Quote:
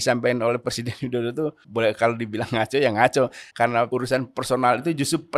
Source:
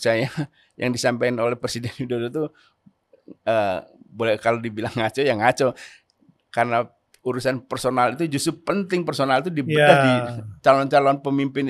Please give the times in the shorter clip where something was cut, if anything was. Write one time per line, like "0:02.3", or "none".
0:01.6
0:03.7